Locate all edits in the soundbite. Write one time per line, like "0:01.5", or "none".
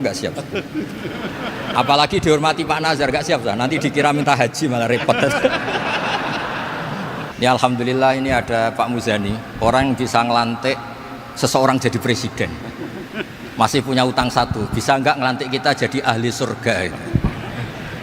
0:07.2